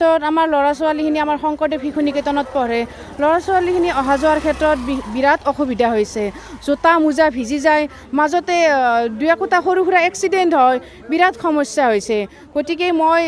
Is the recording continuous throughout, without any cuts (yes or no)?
yes